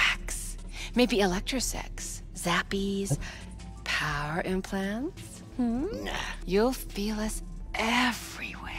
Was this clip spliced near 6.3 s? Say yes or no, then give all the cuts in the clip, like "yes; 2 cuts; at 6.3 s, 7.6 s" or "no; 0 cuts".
yes; 1 cut; at 6.3 s